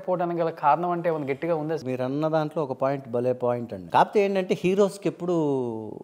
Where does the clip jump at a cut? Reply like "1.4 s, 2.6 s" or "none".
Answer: 1.8 s, 3.7 s